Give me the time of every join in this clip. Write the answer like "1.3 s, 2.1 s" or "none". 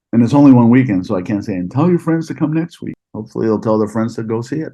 2.9 s